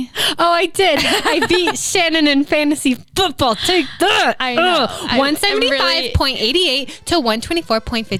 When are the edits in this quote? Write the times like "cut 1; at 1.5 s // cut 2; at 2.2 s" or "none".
none